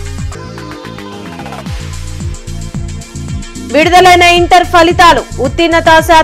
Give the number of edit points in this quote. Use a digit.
1